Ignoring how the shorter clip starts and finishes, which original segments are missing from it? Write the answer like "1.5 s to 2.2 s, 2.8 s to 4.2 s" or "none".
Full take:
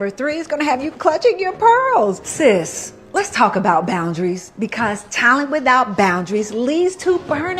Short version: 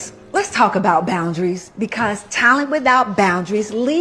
none